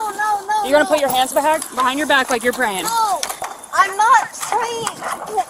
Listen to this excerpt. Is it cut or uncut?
uncut